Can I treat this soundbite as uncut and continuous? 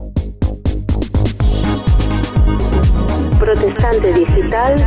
yes; 0 cuts

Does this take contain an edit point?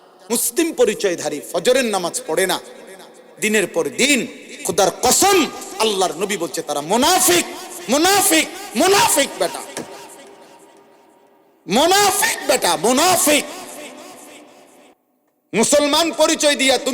yes; 1 cut; at 15.0 s

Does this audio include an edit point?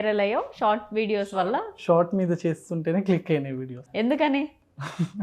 yes; 1 cut; at 3.7 s

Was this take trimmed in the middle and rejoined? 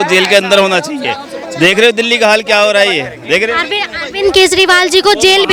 no; 0 cuts

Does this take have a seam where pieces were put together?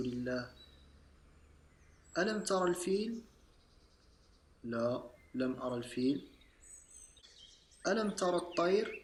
no; 0 cuts

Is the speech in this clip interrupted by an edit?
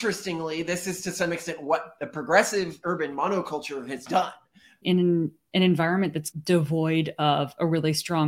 yes; 1 cut; at 4.8 s

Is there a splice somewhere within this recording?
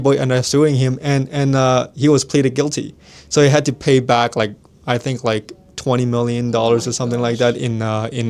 no; 0 cuts

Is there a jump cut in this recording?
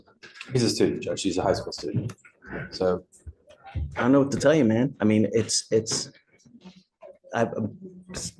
no; 0 cuts

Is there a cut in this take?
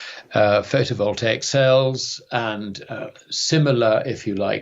no; 0 cuts

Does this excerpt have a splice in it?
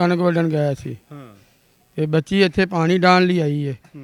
no; 0 cuts

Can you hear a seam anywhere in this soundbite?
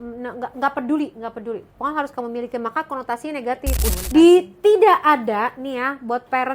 yes; 1 cut; at 3.9 s

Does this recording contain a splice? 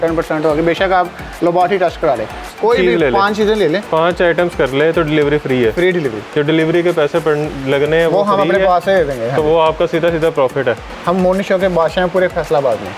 yes; 2 cuts; at 2.5 s, 10.9 s

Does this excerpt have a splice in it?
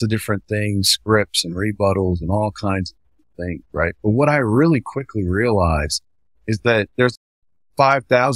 yes; 1 cut; at 6.9 s

